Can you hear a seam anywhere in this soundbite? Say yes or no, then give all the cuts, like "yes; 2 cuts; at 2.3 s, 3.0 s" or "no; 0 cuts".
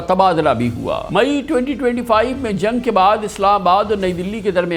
yes; 1 cut; at 1.0 s